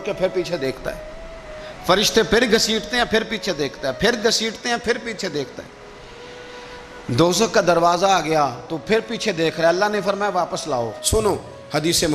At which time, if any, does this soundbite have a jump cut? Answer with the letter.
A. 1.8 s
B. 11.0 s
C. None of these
B